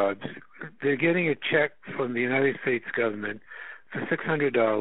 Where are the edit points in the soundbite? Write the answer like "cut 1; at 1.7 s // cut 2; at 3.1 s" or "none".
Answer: none